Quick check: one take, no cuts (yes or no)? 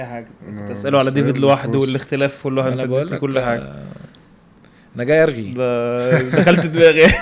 yes